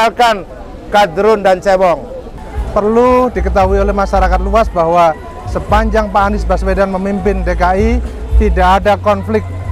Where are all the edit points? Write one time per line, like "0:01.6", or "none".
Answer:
0:02.3